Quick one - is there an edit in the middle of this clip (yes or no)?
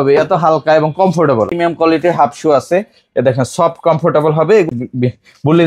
yes